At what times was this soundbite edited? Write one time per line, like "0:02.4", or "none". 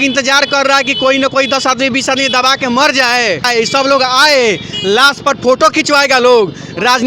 0:03.5